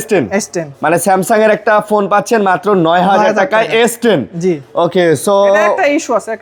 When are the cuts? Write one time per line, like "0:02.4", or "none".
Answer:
none